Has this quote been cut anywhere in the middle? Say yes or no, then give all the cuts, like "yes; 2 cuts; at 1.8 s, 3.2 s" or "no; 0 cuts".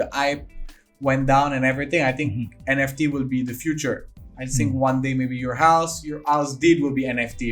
no; 0 cuts